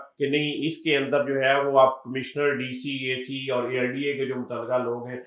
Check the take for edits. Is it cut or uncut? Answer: uncut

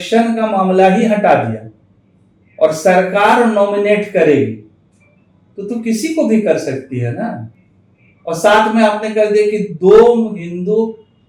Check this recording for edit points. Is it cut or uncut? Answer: uncut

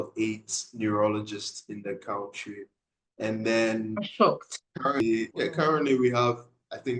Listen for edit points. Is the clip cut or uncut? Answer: cut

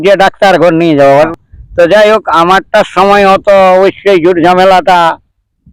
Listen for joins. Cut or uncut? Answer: cut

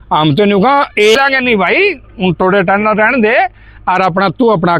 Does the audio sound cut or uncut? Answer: cut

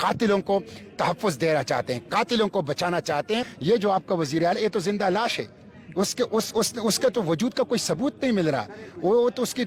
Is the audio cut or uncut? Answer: cut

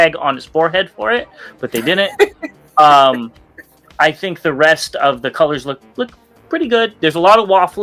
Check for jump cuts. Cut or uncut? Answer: uncut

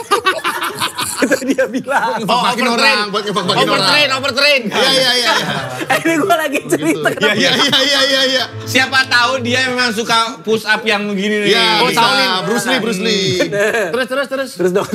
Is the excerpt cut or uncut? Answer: uncut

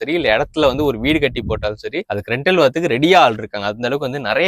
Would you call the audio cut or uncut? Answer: uncut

